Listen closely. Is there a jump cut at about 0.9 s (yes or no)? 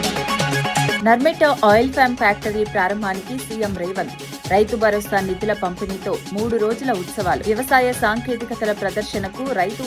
yes